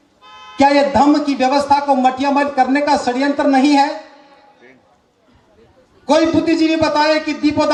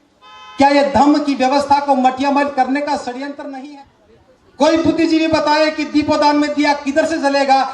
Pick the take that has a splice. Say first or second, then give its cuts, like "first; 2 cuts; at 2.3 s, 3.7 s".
second; 1 cut; at 3.6 s